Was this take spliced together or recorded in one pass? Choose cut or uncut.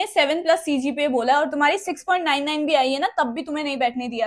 uncut